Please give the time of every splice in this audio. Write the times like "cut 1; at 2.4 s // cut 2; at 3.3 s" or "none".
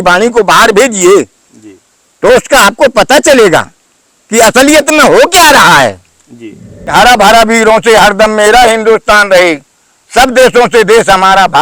cut 1; at 6.9 s